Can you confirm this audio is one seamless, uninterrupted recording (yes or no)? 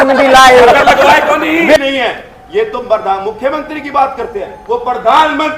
no